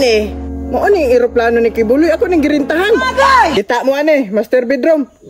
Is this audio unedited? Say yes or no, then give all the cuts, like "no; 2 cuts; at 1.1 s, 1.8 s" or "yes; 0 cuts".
no; 1 cut; at 3.5 s